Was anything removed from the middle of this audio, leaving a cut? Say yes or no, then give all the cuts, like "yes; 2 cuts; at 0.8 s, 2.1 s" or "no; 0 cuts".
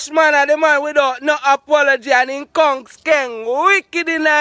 no; 0 cuts